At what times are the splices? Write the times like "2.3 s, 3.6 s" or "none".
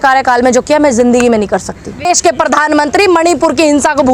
2.0 s